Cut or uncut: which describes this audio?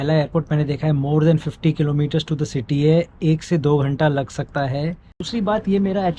uncut